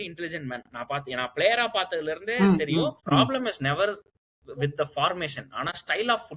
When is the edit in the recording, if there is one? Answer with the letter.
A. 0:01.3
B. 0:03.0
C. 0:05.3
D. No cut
B